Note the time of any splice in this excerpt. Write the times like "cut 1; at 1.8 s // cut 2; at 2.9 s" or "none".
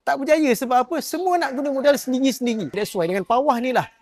cut 1; at 2.7 s